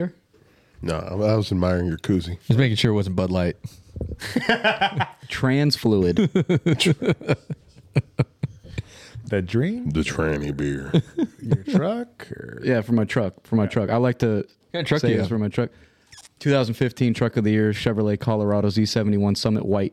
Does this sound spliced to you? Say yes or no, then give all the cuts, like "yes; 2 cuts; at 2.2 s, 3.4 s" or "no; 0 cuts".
no; 0 cuts